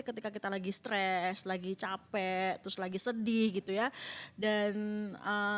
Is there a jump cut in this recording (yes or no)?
no